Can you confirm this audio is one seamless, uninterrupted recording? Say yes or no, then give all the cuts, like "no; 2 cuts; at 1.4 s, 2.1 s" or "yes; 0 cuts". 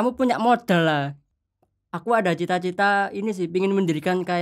no; 1 cut; at 1.2 s